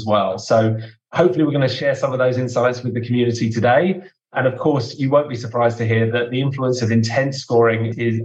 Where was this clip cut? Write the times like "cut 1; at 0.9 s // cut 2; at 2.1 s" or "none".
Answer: cut 1; at 6.1 s